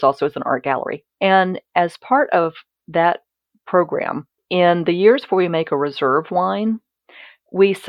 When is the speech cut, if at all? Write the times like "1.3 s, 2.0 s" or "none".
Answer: 1.0 s, 4.3 s

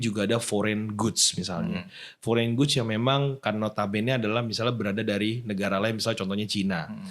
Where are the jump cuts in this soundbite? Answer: none

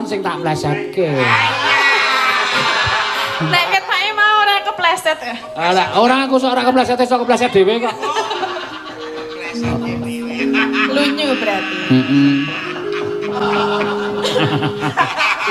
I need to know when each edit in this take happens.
none

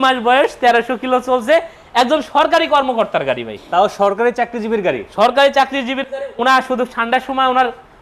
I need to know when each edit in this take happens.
none

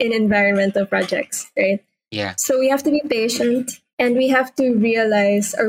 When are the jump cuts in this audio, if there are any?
3.8 s

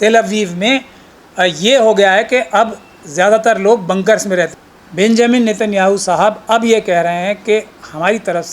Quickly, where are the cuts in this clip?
4.5 s

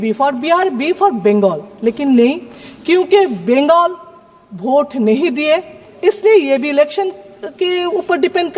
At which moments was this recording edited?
none

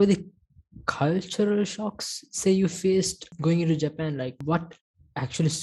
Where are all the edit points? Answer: 3.3 s, 4.4 s

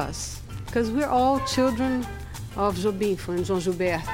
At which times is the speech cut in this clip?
3.2 s

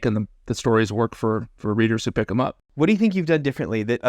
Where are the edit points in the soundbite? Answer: 2.6 s

